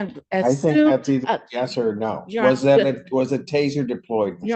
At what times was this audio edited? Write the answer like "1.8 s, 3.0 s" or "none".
none

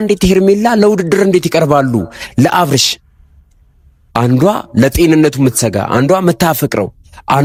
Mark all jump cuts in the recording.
none

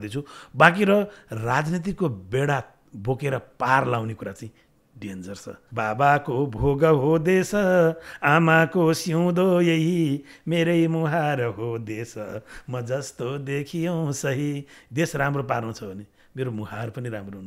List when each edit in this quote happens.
5.6 s

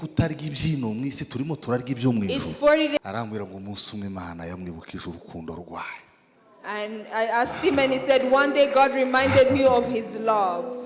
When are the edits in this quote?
3.0 s

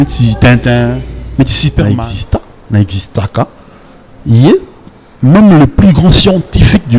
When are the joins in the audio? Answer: 1.8 s

